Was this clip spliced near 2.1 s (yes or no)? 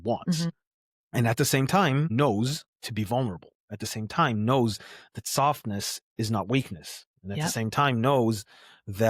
yes